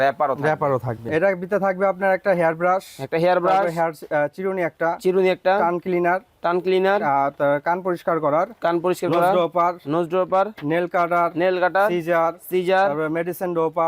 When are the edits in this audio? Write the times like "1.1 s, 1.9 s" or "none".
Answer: 1.0 s